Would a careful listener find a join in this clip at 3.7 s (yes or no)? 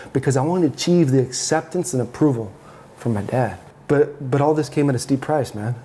yes